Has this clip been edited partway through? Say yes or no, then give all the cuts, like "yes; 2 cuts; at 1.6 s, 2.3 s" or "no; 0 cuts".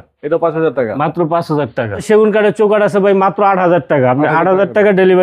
yes; 1 cut; at 2.0 s